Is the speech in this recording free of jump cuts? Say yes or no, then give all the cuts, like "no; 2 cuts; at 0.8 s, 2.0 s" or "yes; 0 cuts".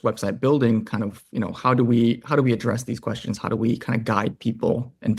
yes; 0 cuts